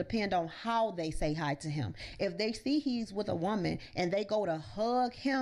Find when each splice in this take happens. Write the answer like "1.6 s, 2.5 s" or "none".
none

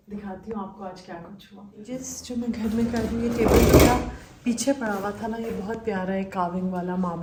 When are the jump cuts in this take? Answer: none

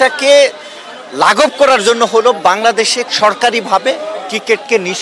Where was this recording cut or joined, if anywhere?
3.0 s

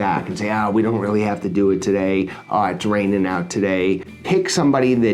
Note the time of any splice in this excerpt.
4.1 s

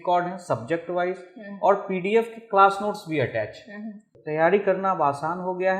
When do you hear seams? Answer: 4.1 s

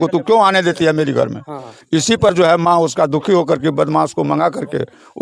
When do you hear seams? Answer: none

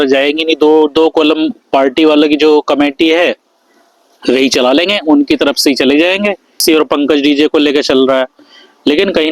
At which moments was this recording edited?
6.6 s

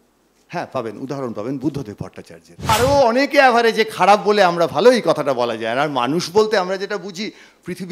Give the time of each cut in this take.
2.7 s

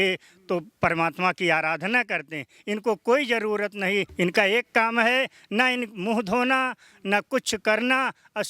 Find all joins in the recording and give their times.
4.1 s

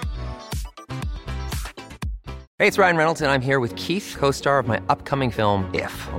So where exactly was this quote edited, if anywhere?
2.4 s

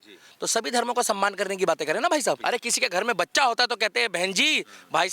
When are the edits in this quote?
2.4 s

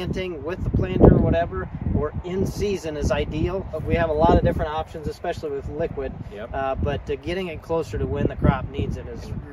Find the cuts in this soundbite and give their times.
3.8 s

